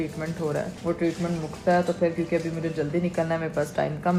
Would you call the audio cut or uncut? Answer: uncut